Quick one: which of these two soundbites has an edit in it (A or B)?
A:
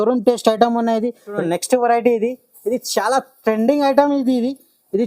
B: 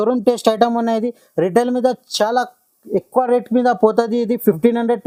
A